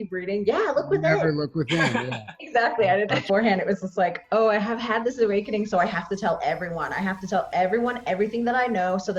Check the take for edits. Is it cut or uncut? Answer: cut